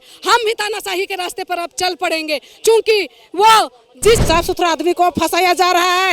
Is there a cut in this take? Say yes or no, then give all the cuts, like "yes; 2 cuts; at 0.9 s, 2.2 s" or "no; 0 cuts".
yes; 1 cut; at 4.2 s